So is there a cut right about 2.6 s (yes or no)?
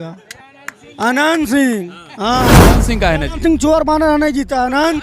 yes